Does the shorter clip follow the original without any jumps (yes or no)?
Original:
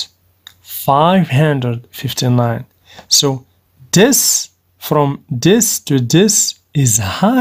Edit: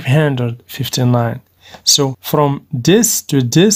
no